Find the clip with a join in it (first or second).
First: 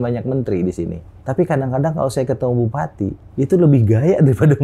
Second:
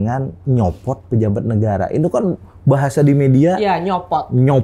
first